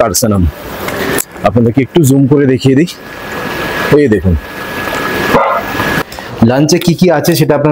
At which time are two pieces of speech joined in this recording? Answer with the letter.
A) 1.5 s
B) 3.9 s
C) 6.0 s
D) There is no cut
C